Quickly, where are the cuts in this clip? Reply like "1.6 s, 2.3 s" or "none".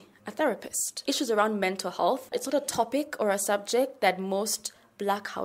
0.9 s, 2.3 s